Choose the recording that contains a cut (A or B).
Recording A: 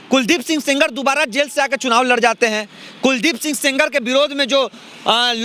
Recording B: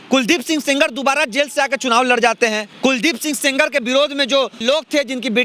B